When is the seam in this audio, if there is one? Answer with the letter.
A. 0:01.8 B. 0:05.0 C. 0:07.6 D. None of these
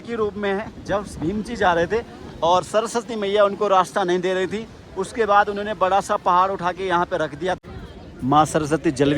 C